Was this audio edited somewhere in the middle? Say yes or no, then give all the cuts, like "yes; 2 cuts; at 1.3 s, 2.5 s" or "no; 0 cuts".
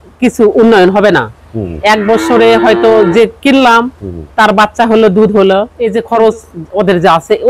yes; 1 cut; at 5.8 s